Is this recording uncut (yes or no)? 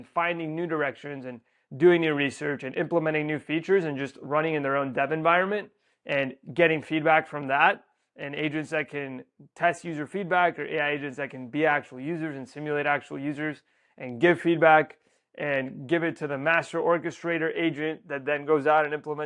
yes